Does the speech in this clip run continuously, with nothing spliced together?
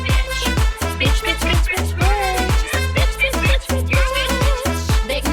yes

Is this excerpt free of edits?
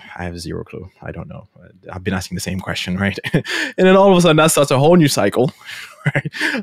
yes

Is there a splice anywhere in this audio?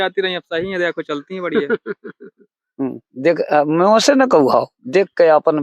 no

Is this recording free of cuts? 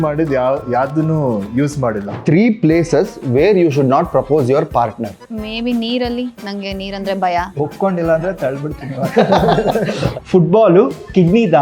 no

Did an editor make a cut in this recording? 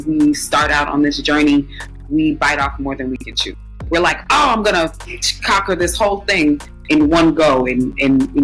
no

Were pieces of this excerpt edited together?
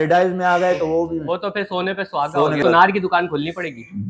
yes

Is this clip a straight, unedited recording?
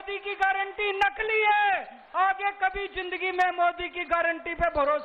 yes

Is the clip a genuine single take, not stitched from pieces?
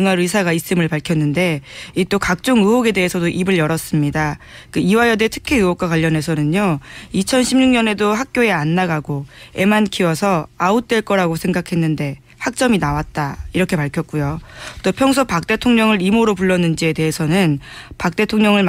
yes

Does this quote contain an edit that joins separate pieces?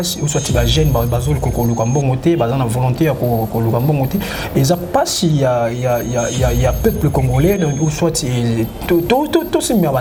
no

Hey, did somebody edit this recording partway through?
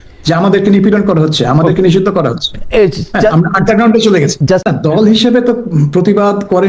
no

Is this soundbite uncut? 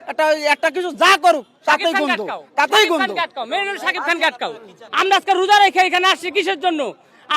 yes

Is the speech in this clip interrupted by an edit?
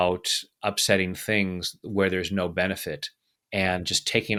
no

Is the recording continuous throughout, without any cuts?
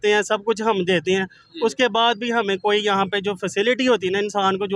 yes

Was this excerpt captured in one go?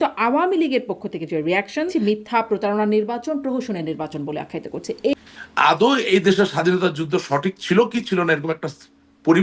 no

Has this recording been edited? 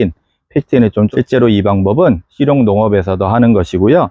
yes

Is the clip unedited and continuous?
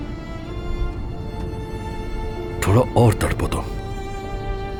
yes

